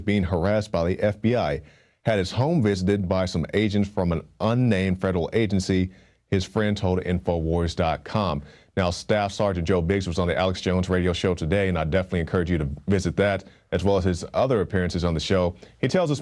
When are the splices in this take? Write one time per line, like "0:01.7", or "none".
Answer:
0:01.3